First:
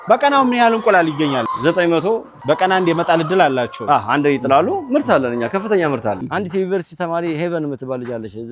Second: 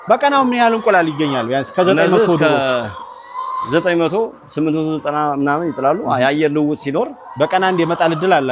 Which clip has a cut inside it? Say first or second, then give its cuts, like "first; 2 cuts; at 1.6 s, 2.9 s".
first; 3 cuts; at 1.4 s, 2.3 s, 6.2 s